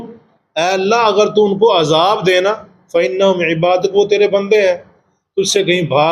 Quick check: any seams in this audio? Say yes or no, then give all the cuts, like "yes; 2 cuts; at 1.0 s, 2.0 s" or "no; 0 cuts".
no; 0 cuts